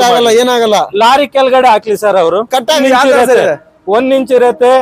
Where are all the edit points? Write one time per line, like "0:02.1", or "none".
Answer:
0:02.8